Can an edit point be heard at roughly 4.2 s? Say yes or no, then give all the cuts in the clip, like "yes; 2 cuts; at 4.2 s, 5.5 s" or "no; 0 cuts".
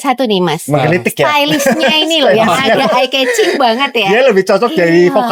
no; 0 cuts